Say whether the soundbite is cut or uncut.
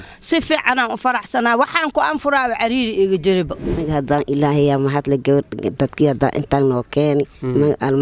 cut